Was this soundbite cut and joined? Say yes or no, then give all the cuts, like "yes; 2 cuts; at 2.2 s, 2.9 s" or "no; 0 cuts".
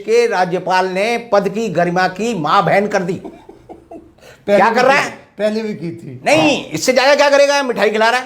no; 0 cuts